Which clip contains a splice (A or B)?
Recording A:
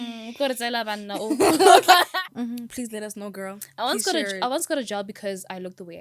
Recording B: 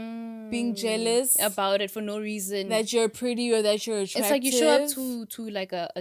A